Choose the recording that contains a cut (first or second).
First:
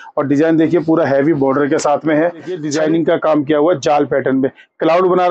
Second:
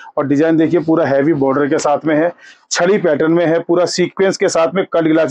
first